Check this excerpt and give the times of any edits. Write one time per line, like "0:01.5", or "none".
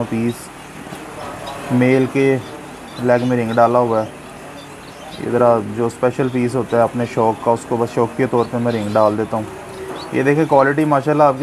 none